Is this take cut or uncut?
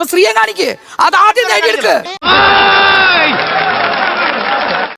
uncut